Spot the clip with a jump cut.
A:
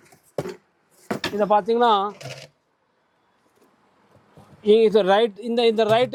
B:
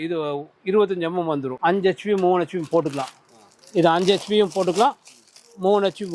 B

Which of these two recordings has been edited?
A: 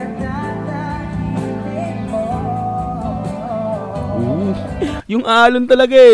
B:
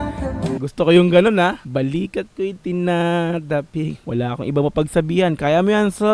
B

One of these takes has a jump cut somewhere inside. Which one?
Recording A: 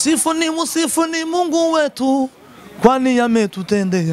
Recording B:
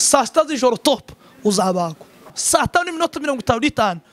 B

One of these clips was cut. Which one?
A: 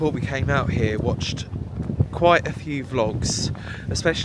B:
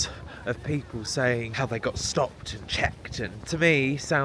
B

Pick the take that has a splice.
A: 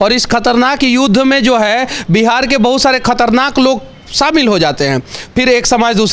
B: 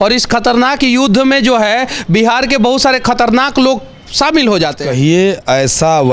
B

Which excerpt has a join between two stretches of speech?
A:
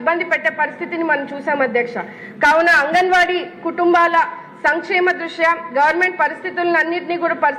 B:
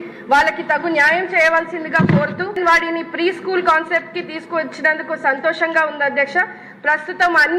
B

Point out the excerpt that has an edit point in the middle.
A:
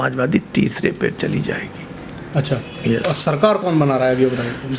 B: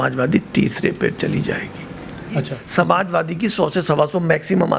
B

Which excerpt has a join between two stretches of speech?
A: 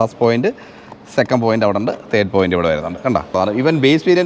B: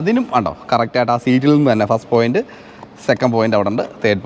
A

